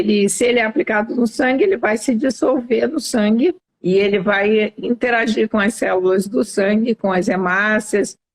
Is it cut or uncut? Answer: cut